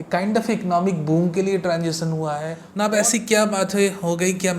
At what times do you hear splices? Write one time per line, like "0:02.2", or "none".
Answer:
0:02.6